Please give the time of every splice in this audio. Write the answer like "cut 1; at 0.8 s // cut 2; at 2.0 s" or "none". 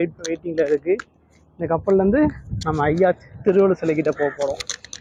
none